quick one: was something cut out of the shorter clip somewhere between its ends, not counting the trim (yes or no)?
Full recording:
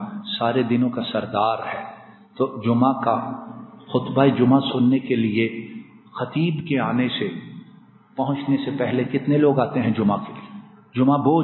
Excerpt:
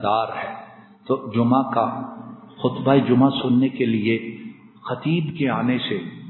no